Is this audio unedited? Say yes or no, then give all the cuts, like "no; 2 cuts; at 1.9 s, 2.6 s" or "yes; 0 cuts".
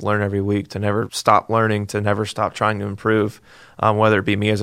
no; 1 cut; at 1.1 s